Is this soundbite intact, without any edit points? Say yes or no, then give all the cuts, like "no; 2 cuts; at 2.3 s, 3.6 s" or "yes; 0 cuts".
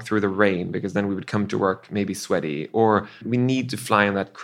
no; 1 cut; at 3.2 s